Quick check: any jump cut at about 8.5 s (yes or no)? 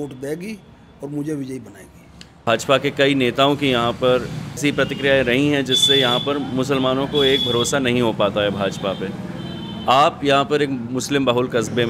no